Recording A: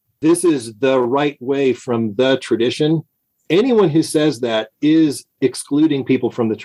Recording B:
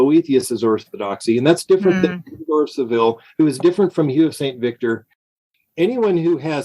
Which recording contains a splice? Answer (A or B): B